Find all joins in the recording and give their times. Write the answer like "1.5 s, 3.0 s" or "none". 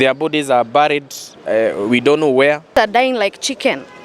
2.7 s